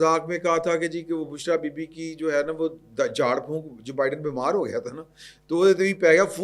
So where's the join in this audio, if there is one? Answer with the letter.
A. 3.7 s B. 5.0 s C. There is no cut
C